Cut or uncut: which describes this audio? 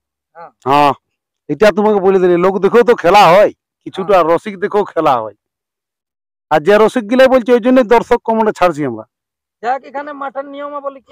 uncut